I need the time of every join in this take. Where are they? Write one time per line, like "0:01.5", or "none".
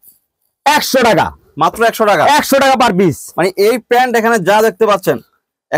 none

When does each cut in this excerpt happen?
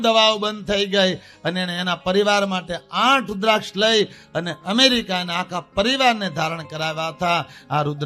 none

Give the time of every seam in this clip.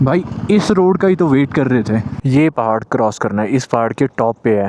0:02.1

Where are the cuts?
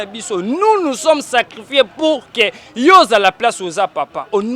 none

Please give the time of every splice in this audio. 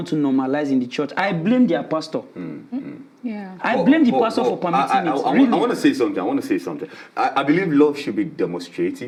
none

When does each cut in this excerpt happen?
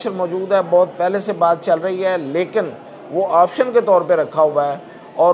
none

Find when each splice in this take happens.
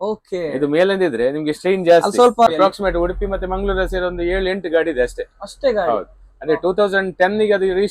0:02.5

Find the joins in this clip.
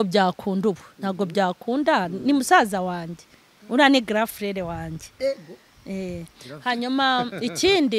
none

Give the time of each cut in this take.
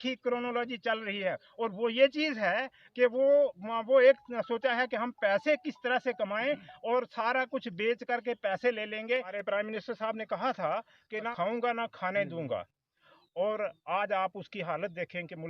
0:09.3
0:11.3

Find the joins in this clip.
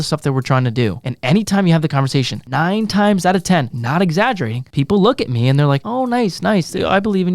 0:01.1
0:02.4
0:03.8
0:04.6
0:05.9

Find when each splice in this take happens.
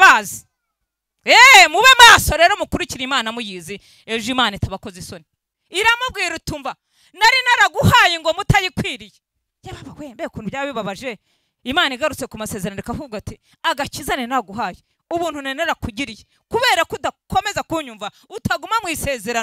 0:05.5

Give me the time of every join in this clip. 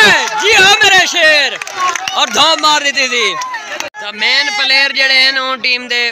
0:04.0

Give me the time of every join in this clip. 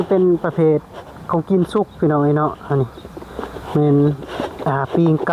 none

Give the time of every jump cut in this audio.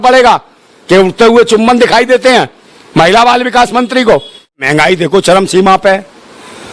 0:04.6

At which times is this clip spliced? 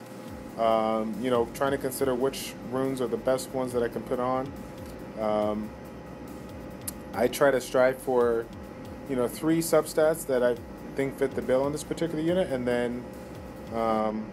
0:11.4

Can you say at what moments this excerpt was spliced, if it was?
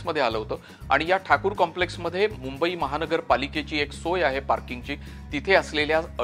none

